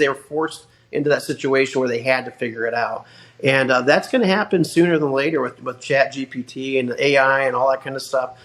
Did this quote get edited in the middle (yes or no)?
no